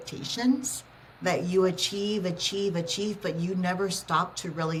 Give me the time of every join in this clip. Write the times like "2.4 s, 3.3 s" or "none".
none